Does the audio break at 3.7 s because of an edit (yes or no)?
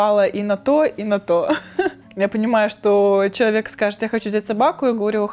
no